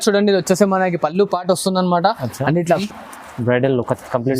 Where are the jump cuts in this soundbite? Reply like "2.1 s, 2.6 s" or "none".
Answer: 2.8 s

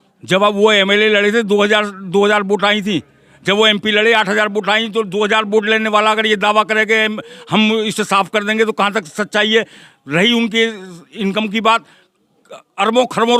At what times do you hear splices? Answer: none

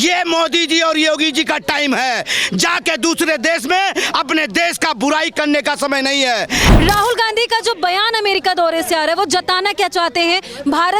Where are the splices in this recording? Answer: 6.7 s

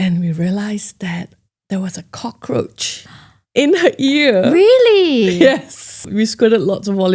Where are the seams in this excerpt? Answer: 6.1 s

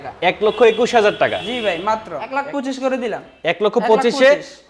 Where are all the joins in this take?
2.2 s

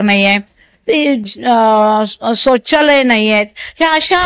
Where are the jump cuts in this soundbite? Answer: none

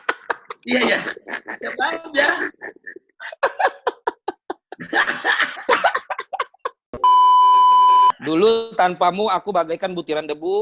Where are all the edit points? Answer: 6.9 s, 8.2 s

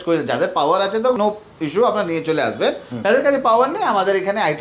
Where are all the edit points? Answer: none

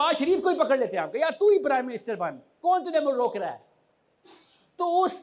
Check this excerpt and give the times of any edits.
none

